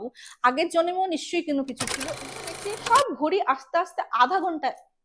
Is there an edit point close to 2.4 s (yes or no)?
yes